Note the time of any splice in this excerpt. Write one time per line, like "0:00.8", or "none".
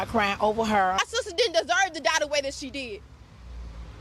0:01.0